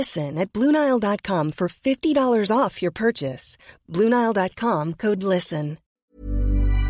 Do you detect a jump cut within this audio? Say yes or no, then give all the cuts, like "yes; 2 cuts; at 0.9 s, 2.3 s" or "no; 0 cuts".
yes; 1 cut; at 5.8 s